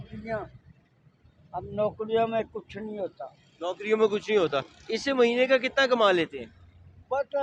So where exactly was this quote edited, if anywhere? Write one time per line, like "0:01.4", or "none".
none